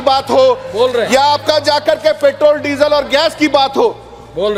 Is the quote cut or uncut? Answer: uncut